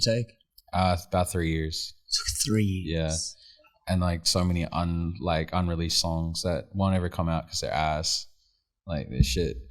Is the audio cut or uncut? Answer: uncut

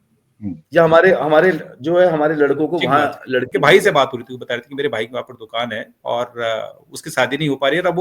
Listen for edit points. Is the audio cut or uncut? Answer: cut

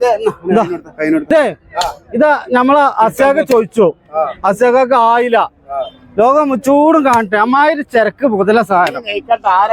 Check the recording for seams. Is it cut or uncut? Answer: cut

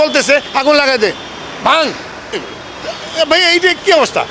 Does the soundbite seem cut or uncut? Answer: uncut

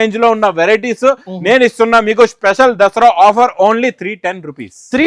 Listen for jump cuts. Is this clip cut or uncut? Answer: uncut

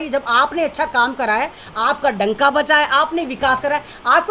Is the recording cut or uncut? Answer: uncut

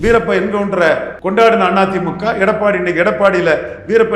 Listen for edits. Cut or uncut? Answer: cut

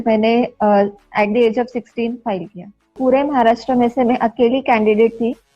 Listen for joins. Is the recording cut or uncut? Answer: cut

